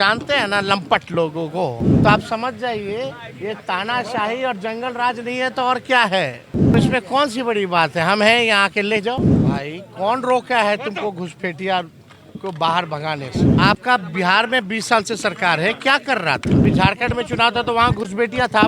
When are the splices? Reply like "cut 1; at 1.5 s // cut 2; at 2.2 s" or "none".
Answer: cut 1; at 1.9 s // cut 2; at 6.7 s // cut 3; at 9.3 s // cut 4; at 13.4 s // cut 5; at 16.6 s